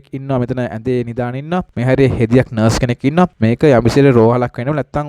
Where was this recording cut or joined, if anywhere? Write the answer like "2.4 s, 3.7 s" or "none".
1.7 s, 3.4 s